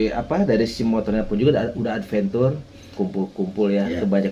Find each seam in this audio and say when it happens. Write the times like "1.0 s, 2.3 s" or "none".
2.9 s